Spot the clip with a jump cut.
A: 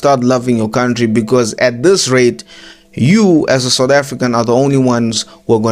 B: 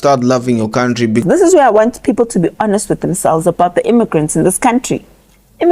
B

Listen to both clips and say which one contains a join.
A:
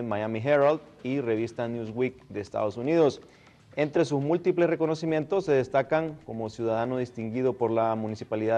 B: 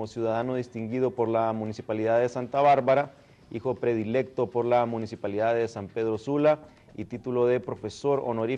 B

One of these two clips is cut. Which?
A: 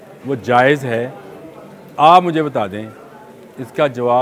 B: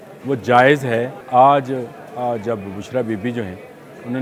B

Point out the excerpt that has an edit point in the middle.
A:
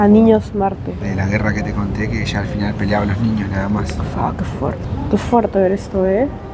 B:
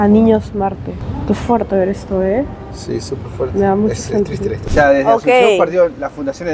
B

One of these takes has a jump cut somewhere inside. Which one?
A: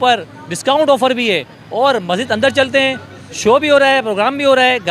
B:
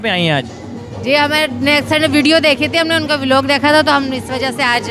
A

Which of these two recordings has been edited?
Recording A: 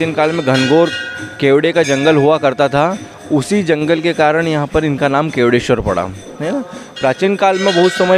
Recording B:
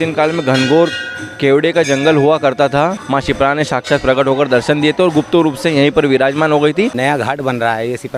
B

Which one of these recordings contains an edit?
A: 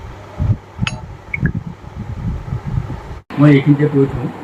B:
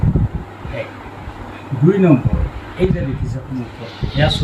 A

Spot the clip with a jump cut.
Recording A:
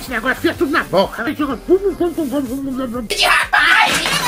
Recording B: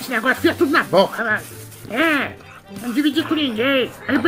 A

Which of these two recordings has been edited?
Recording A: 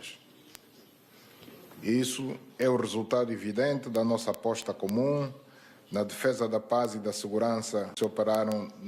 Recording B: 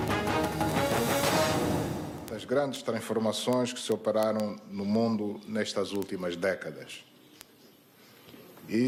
A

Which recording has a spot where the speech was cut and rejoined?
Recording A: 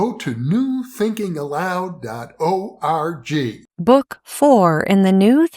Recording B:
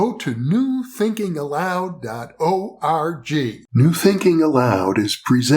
B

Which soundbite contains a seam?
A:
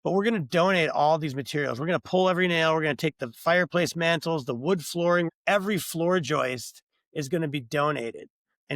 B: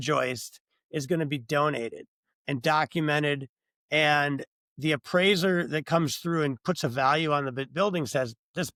A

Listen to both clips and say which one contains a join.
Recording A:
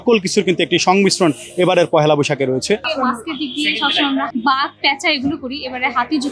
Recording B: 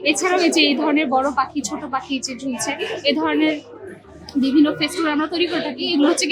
A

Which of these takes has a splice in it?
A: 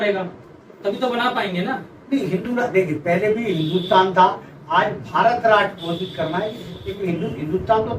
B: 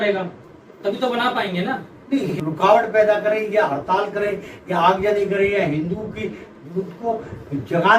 B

